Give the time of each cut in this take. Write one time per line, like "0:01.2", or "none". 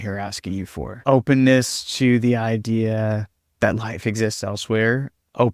none